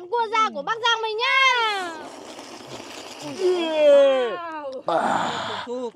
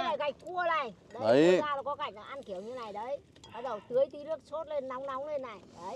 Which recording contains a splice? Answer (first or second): first